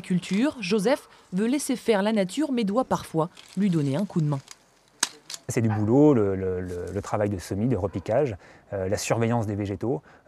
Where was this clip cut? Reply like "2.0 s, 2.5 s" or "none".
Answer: 1.0 s